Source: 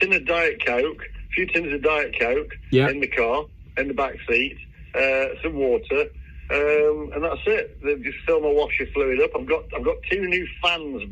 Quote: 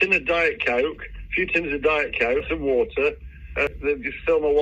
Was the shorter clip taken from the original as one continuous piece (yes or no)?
no